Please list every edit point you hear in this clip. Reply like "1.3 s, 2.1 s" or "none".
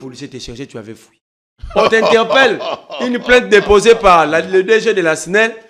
none